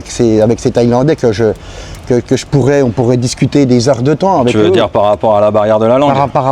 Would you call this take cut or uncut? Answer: uncut